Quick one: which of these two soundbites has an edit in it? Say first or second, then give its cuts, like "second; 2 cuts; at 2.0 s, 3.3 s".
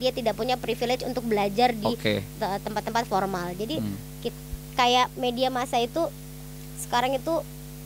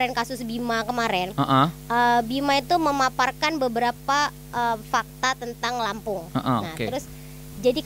first; 1 cut; at 4.3 s